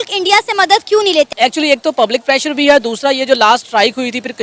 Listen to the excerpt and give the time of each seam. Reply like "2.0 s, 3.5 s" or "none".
1.3 s

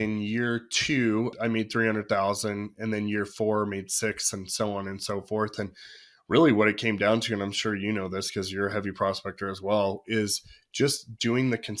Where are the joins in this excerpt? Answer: 1.3 s

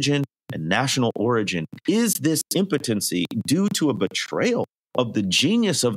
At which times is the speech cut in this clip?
1.7 s, 4.8 s

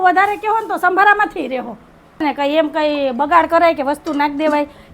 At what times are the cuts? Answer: 2.2 s

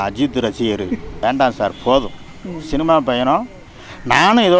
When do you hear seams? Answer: 1.1 s

